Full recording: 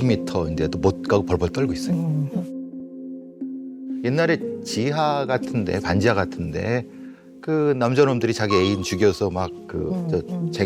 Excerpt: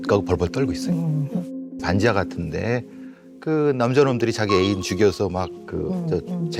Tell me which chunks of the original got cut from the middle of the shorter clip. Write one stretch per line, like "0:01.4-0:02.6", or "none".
0:02.8-0:05.8